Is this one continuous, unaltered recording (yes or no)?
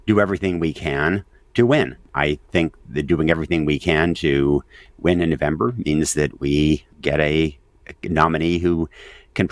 no